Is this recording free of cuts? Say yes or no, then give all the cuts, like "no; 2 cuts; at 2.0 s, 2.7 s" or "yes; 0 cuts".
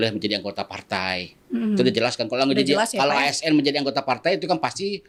yes; 0 cuts